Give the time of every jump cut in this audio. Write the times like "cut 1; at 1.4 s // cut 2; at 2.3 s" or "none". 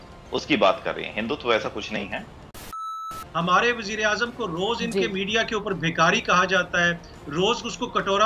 cut 1; at 2.8 s